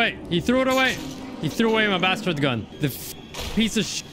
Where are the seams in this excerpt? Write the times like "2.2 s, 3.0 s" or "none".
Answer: 3.2 s

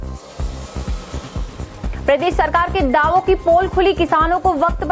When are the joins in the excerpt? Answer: none

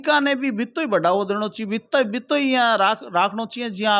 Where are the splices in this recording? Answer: none

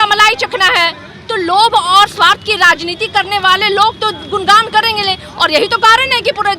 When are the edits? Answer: none

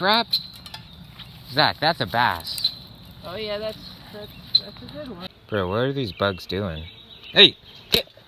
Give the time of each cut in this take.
5.3 s

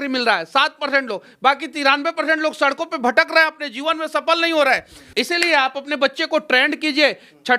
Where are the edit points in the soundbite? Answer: 5.0 s

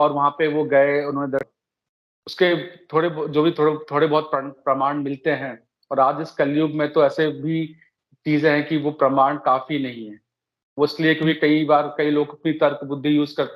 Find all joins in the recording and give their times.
1.5 s

